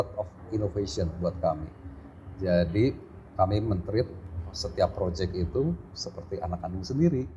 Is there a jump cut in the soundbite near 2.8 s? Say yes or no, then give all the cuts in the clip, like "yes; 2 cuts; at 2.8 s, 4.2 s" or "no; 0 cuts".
no; 0 cuts